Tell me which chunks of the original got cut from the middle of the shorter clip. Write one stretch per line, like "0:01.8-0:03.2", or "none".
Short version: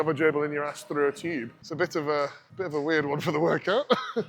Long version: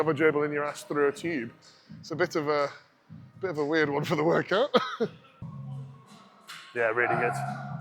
0:01.6-0:02.0
0:02.8-0:03.3